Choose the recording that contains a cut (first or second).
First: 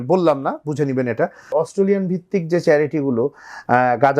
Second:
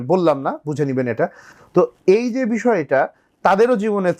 first